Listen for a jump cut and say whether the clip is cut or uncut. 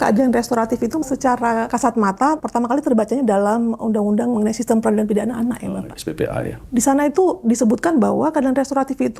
cut